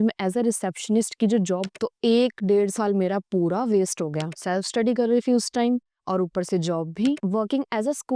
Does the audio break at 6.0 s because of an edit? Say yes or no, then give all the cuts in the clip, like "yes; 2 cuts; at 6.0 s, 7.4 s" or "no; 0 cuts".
no; 3 cuts; at 1.8 s, 4.4 s, 7.2 s